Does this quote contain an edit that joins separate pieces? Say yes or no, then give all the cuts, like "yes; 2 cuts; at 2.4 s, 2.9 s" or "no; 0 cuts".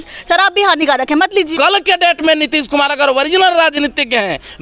yes; 1 cut; at 1.5 s